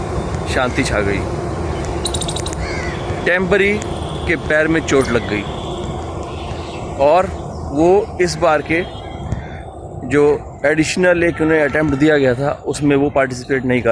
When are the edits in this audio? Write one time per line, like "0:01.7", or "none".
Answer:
none